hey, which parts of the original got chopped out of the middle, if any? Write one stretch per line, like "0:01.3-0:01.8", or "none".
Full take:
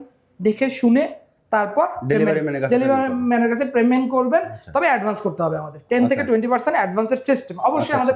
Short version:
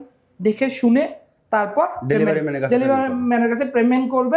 none